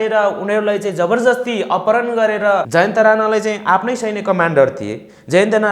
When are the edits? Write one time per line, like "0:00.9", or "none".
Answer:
0:02.7